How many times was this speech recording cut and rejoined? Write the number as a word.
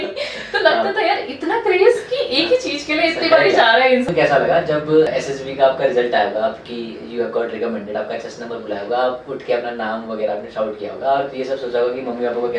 two